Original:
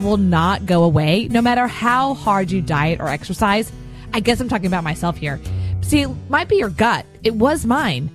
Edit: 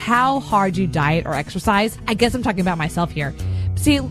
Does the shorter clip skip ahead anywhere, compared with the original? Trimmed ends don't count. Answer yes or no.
yes